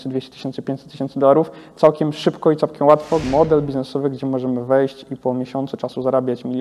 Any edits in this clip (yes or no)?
yes